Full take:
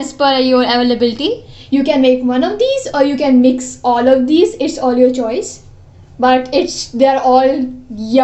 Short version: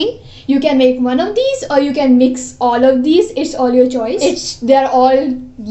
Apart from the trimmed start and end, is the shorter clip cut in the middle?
yes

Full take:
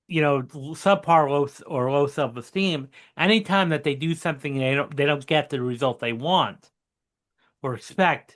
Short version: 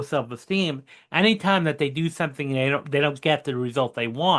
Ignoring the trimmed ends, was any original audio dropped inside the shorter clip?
no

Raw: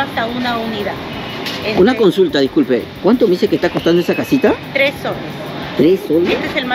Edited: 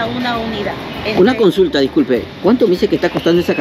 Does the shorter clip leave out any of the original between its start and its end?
yes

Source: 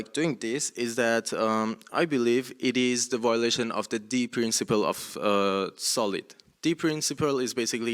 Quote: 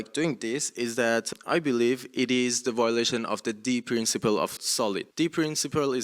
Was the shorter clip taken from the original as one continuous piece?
no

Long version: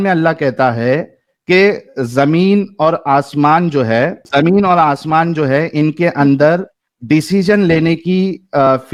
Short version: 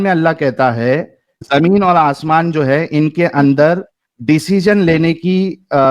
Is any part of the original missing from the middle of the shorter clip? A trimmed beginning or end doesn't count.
yes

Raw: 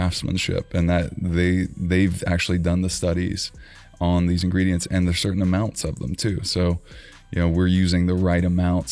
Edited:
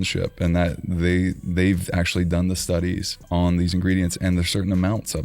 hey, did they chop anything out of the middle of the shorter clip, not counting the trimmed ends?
yes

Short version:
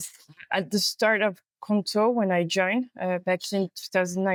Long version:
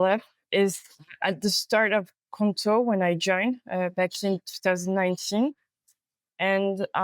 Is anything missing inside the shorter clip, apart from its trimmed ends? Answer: no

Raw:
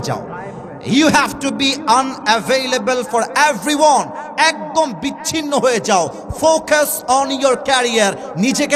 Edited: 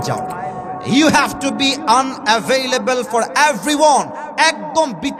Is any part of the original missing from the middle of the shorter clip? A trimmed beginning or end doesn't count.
no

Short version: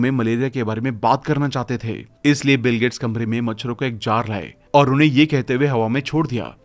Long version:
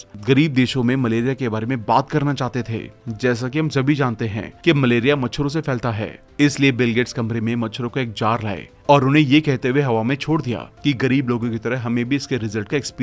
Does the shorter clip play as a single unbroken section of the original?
no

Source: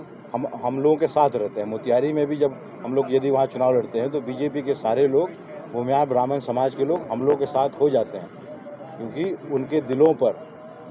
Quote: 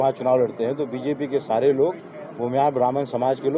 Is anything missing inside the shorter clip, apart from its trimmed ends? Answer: no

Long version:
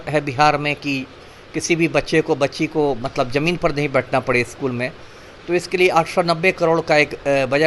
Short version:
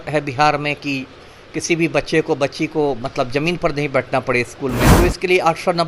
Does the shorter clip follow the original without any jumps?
no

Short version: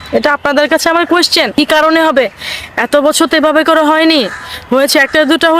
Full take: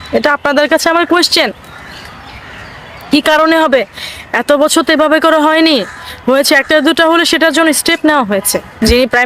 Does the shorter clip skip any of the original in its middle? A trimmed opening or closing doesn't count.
yes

